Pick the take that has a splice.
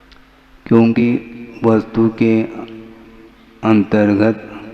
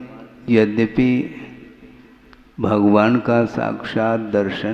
first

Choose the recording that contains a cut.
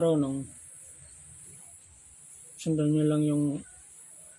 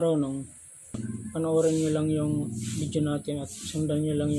second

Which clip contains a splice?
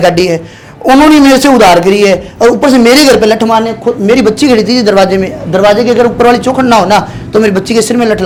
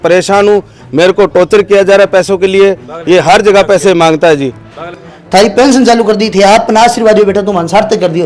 second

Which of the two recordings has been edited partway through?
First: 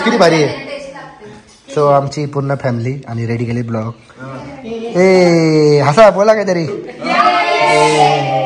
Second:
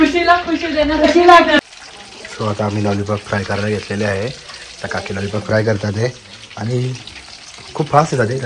second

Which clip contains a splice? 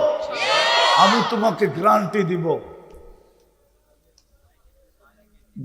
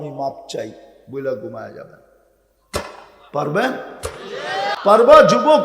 second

